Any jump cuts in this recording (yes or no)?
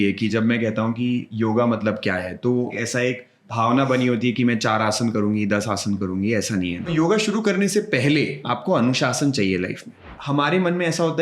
yes